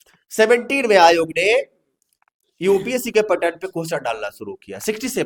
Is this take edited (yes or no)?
no